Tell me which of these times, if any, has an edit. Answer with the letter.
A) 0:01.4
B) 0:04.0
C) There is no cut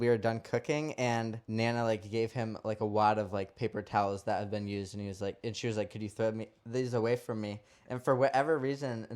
A